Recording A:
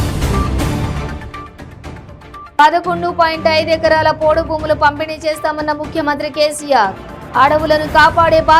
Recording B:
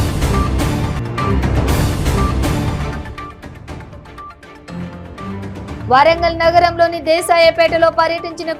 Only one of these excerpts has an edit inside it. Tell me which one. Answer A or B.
A